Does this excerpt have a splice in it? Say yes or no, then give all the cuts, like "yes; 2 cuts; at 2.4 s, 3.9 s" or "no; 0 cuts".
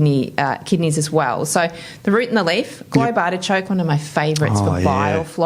no; 0 cuts